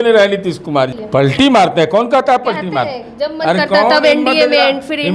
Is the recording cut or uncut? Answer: cut